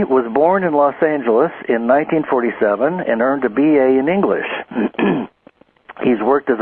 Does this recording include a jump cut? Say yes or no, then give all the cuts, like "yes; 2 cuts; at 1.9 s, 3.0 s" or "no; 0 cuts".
no; 0 cuts